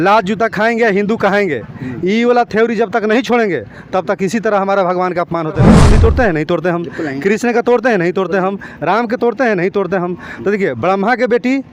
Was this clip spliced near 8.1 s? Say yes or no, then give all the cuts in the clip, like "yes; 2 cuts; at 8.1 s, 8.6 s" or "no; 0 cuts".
no; 1 cut; at 5.7 s